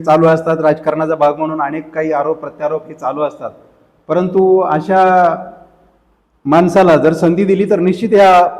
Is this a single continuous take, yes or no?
yes